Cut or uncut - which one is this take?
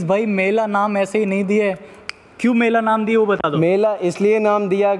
uncut